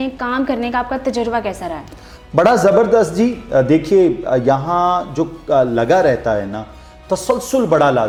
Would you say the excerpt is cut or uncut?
uncut